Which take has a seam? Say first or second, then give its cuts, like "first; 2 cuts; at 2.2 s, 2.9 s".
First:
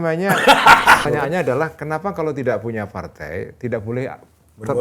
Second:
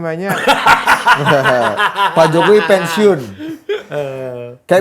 first; 1 cut; at 1.0 s